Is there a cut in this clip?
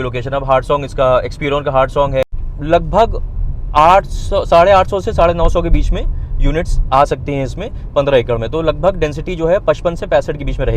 yes; 1 cut; at 2.2 s

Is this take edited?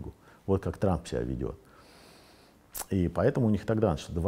no; 0 cuts

